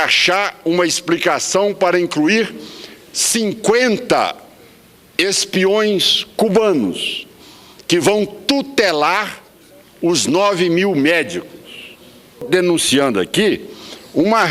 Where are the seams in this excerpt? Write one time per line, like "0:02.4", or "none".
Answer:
0:12.5